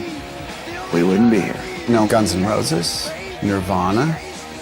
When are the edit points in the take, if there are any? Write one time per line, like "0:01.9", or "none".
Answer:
0:01.9